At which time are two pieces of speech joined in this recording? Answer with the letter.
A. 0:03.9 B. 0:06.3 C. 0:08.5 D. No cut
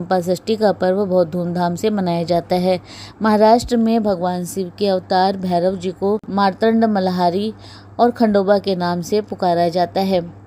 B